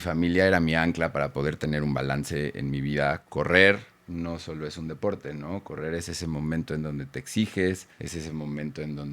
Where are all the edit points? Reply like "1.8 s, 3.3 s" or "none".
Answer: 3.2 s, 7.9 s